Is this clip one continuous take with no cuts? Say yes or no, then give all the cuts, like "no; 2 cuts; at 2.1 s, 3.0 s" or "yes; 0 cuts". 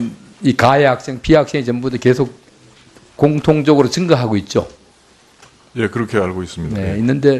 yes; 0 cuts